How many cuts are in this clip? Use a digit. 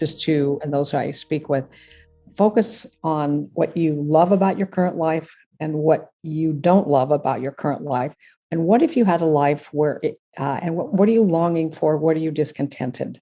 1